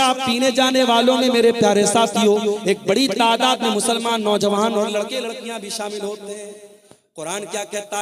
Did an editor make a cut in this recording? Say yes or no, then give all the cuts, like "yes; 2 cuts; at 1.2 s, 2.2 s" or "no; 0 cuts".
no; 0 cuts